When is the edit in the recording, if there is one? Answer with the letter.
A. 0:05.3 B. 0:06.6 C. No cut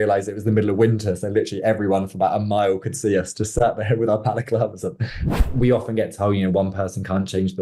A